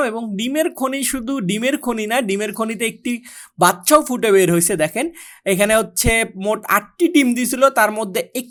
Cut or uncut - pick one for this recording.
uncut